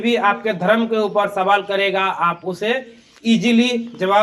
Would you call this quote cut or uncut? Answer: uncut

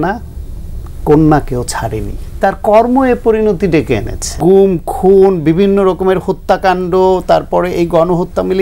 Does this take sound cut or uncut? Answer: cut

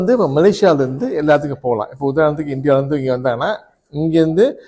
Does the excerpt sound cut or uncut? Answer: uncut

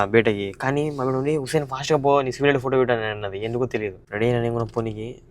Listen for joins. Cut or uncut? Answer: cut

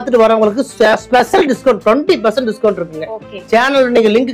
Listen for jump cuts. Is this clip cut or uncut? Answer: uncut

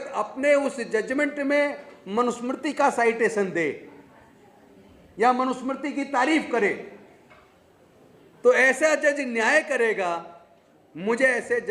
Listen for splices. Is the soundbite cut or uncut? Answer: uncut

